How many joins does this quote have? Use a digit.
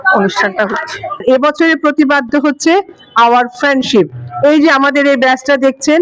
1